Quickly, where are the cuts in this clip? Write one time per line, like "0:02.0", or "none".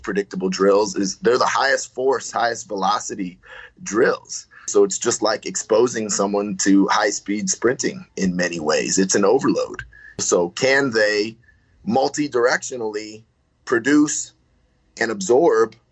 0:04.7
0:10.2